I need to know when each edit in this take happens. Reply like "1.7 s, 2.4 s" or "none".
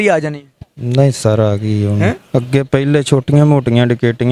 none